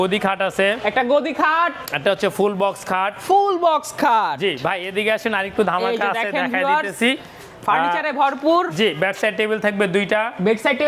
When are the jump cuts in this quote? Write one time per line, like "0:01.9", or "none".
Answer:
none